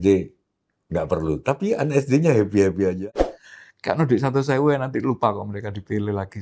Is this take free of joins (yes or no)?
no